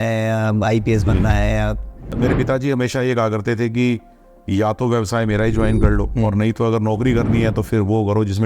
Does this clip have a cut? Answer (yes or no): yes